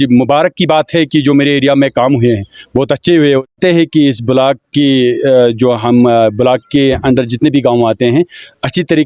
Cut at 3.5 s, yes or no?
yes